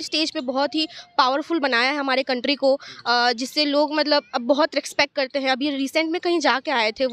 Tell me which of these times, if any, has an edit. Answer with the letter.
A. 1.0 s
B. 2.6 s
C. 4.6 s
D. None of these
D